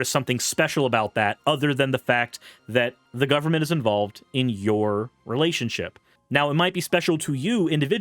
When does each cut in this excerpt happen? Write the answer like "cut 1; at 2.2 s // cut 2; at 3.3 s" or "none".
cut 1; at 3.0 s